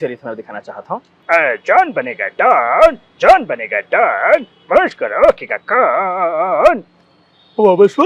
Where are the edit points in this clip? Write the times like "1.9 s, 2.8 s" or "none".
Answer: none